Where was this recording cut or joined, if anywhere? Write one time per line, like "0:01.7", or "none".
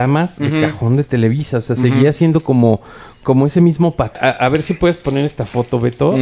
0:04.2